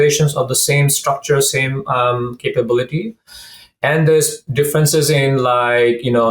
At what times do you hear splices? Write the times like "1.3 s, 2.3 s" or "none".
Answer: none